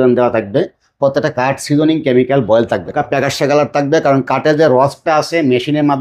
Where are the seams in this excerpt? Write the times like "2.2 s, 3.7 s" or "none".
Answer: 2.9 s